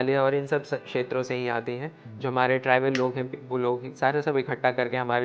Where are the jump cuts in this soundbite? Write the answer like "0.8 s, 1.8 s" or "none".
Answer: none